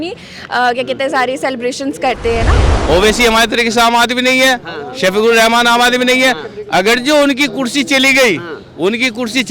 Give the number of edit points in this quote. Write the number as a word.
one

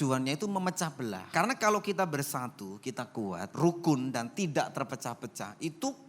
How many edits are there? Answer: two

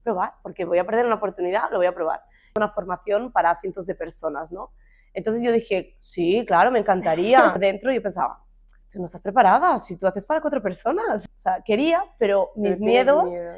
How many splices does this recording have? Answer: three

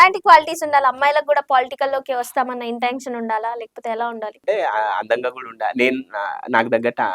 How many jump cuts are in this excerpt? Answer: one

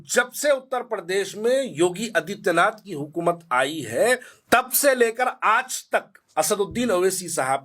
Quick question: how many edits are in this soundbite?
two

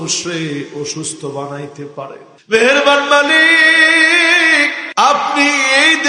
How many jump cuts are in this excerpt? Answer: two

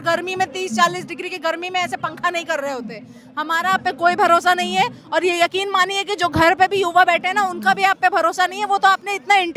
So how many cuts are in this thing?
zero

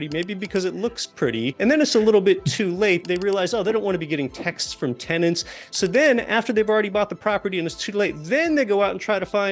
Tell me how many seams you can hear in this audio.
two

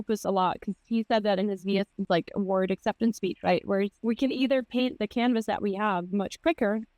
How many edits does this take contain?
two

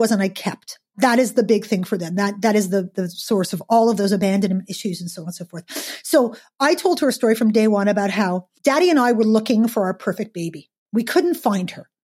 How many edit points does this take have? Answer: two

